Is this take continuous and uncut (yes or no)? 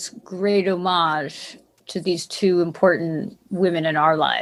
yes